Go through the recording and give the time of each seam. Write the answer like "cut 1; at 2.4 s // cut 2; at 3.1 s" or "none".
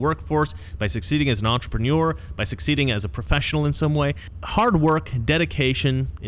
cut 1; at 4.3 s